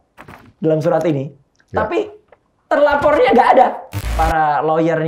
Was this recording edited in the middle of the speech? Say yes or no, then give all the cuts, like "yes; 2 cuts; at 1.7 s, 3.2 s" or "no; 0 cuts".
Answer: yes; 1 cut; at 4.1 s